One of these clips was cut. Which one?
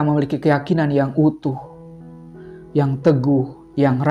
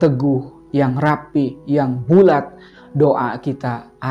second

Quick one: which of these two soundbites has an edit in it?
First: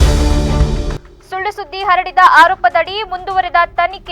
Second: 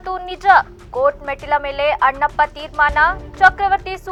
first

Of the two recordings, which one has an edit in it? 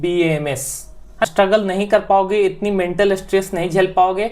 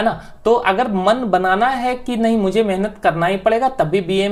first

